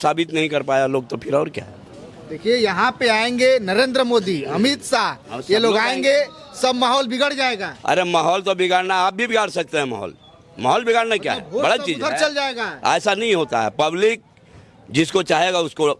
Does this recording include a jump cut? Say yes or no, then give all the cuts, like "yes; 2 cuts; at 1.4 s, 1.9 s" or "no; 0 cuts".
no; 0 cuts